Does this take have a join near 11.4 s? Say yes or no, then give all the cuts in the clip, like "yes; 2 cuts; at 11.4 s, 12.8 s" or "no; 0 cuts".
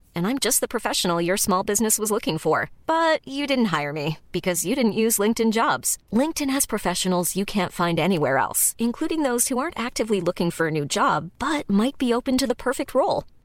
no; 0 cuts